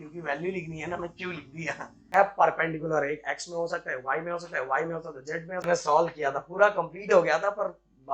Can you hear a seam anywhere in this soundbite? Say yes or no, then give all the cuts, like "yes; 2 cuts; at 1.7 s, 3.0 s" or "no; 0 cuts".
yes; 2 cuts; at 2.0 s, 5.6 s